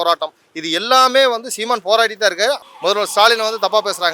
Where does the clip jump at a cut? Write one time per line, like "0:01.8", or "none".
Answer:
0:02.6